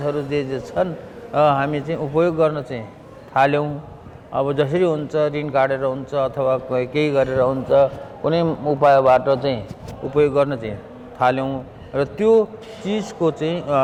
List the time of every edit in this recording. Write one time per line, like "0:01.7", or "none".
none